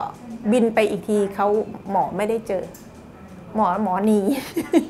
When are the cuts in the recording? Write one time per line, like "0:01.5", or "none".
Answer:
none